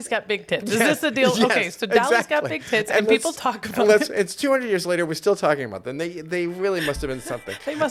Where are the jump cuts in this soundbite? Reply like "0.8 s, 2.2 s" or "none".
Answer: none

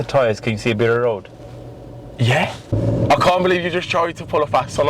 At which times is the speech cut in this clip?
2.7 s

